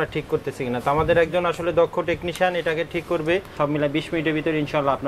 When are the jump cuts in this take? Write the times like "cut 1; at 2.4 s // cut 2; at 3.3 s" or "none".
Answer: cut 1; at 3.5 s